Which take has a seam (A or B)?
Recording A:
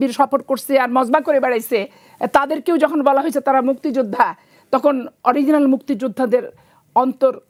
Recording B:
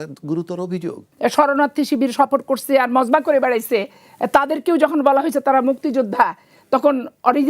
B